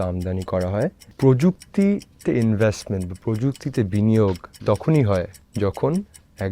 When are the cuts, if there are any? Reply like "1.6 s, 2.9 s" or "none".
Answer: 1.0 s, 5.4 s